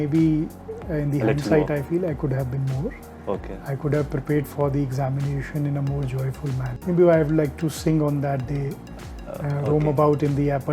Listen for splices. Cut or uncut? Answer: cut